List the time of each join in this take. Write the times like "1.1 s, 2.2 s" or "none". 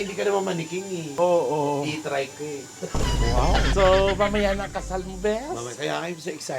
3.7 s

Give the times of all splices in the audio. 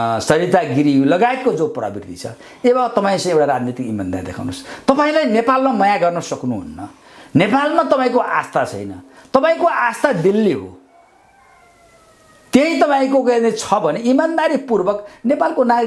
none

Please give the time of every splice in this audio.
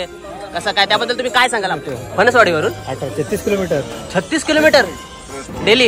1.8 s

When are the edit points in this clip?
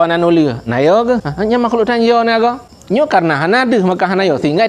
1.3 s, 2.7 s

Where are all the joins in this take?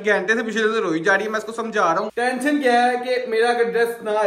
2.1 s

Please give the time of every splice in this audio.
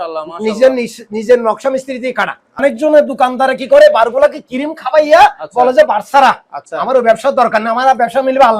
2.6 s

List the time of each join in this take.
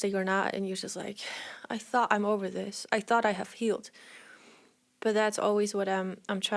none

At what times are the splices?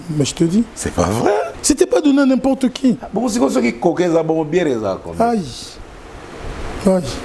1.5 s

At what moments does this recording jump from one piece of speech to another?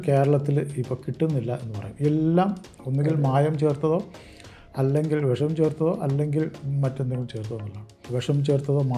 8.1 s

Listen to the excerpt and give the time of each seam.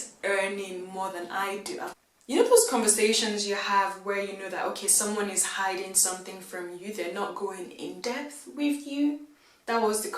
2.3 s

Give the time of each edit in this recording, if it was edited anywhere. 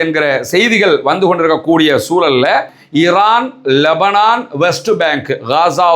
2.8 s

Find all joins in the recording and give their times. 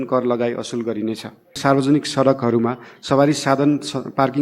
1.6 s

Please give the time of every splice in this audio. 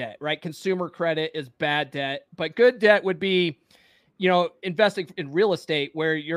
none

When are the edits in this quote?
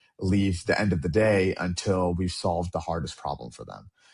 none

